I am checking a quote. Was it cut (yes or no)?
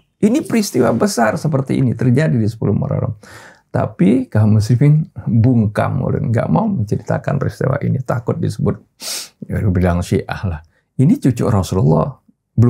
no